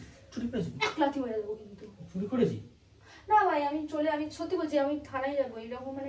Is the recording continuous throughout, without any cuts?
yes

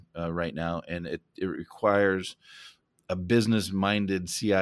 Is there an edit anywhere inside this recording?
no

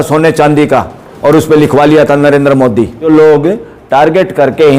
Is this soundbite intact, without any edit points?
no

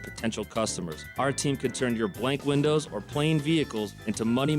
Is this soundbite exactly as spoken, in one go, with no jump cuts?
yes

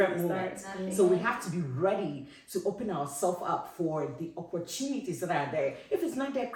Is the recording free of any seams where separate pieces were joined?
yes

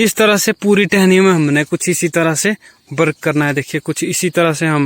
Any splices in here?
no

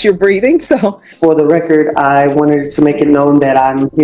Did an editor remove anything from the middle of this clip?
yes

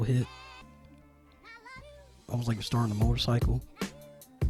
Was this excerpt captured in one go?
yes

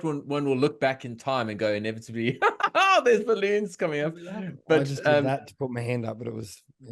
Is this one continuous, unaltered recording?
yes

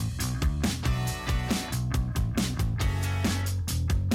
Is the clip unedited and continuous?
no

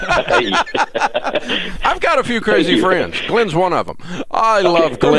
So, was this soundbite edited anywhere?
no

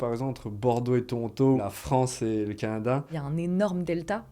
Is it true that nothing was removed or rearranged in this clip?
no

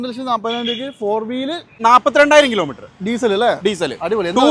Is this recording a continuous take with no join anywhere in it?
no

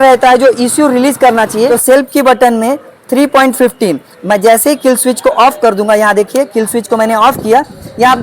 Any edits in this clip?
yes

